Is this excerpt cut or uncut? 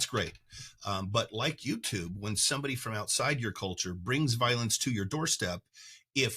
uncut